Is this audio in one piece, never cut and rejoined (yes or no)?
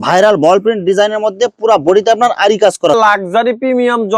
no